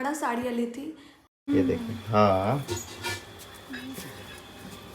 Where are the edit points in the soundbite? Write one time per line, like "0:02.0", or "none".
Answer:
0:01.3